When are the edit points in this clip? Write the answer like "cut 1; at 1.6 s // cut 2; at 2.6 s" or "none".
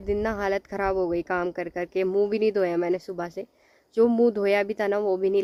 none